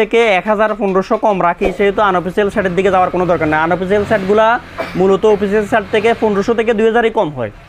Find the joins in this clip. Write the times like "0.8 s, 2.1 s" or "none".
none